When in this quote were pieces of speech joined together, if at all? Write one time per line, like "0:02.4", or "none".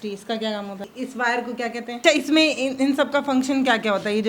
0:00.9
0:02.0